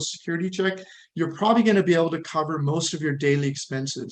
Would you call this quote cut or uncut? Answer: uncut